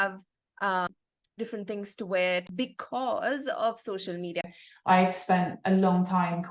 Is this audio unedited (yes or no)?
no